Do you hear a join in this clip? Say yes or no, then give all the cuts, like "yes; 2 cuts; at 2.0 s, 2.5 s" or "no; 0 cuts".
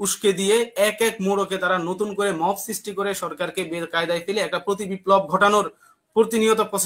no; 0 cuts